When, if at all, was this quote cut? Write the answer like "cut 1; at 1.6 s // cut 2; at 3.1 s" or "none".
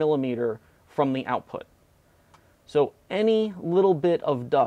none